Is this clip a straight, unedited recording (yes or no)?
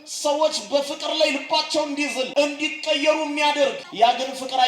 no